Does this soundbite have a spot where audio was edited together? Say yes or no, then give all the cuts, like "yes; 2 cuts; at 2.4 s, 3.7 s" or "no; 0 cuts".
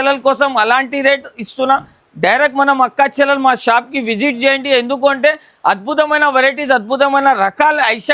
no; 0 cuts